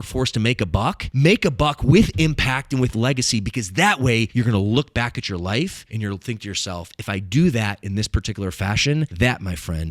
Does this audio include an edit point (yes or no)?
yes